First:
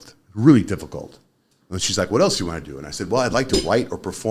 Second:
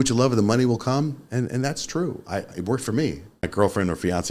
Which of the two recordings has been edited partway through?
second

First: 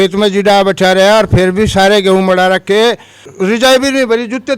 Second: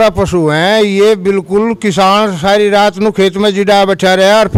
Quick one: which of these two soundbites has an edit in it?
first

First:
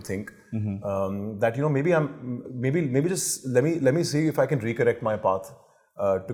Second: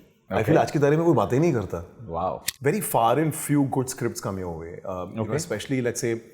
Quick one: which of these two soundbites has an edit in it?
second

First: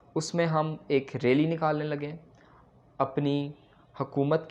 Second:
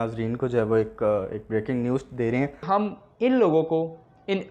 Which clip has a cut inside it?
second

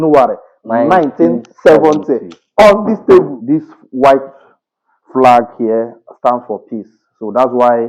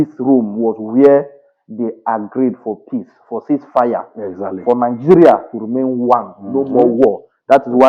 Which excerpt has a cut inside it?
first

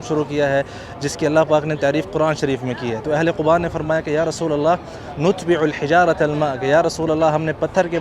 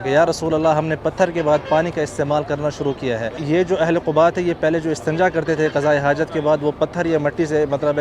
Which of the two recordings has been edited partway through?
second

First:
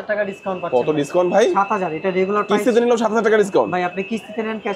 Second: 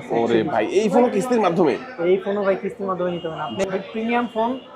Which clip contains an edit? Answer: second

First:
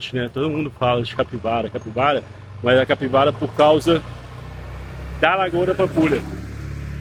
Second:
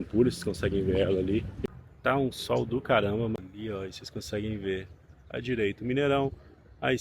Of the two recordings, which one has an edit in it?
second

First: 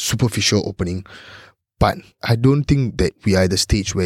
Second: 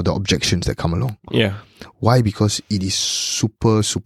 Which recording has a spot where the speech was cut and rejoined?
first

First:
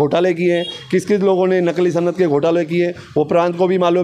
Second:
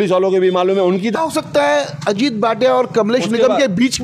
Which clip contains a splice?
second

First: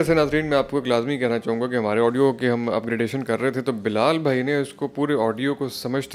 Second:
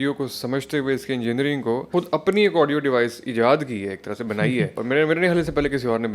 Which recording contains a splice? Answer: second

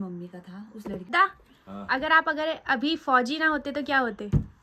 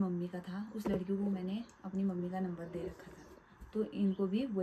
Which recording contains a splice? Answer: first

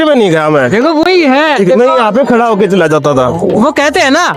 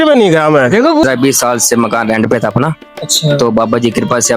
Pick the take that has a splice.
second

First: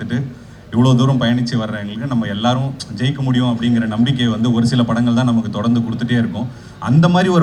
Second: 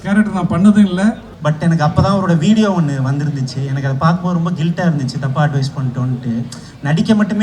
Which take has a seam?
second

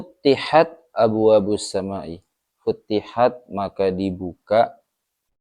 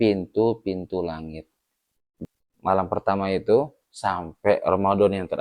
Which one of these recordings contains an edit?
second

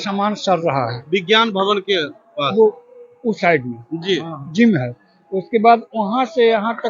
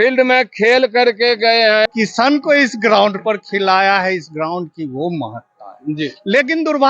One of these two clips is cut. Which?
second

